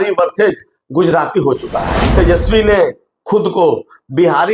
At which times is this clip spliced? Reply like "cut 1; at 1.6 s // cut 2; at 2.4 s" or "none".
cut 1; at 2.1 s